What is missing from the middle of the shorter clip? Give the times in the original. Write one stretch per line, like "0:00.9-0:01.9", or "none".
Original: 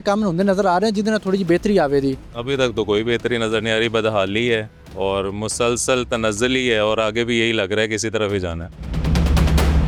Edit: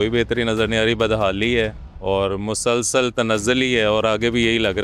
none